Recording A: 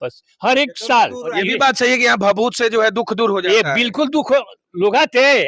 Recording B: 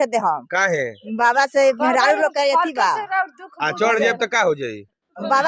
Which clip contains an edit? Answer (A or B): A